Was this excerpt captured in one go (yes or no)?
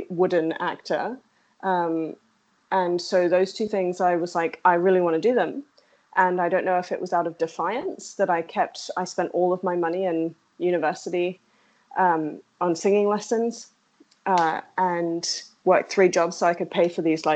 yes